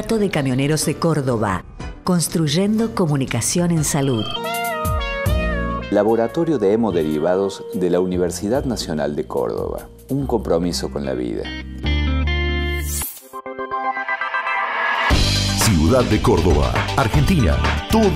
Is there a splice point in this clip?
yes; 1 cut; at 4.3 s

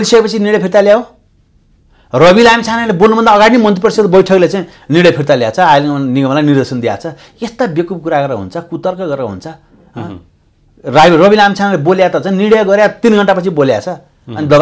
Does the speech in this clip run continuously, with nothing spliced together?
yes; 0 cuts

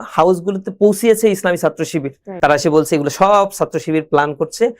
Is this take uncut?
no; 1 cut; at 2.2 s

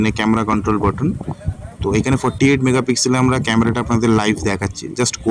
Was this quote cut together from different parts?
no; 0 cuts

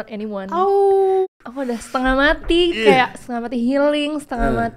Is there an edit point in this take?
yes; 1 cut; at 1.2 s

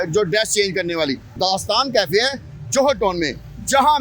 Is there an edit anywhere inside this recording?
yes; 1 cut; at 1.3 s

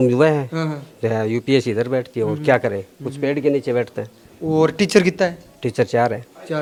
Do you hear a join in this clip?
no; 0 cuts

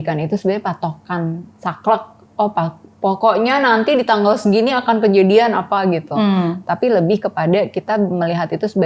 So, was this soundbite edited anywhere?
no; 0 cuts

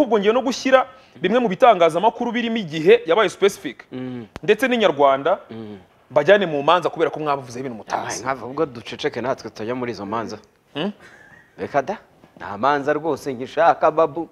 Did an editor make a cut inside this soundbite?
no; 0 cuts

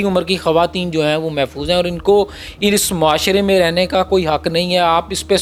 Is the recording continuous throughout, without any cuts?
yes; 0 cuts

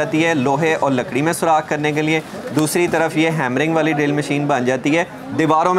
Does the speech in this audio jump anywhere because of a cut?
no; 0 cuts

